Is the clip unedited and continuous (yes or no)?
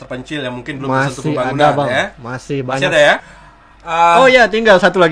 no